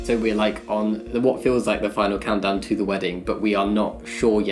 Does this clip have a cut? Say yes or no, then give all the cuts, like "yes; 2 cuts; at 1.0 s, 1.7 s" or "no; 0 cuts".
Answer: no; 0 cuts